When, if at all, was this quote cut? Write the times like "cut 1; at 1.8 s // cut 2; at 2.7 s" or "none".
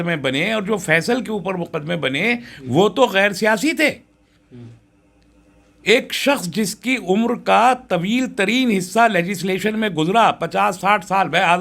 none